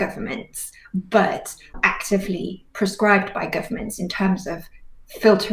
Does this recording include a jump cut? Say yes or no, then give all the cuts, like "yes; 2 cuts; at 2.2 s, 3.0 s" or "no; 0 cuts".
yes; 1 cut; at 1.8 s